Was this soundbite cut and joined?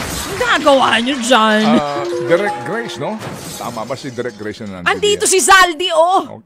no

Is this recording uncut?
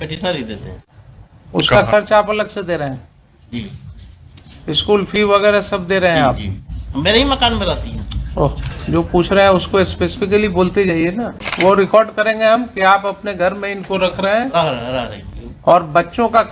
no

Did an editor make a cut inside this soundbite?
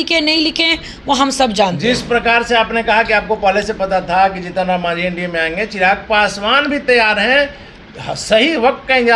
no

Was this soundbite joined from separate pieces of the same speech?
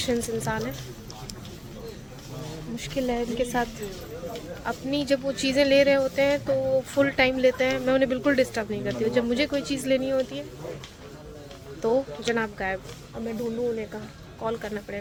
no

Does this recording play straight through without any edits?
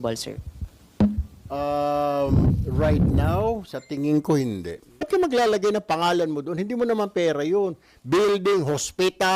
no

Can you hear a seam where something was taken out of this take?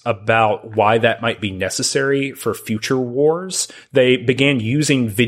no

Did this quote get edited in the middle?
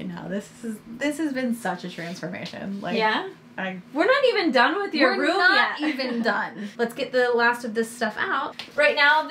no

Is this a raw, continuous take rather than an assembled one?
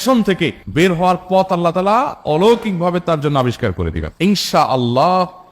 no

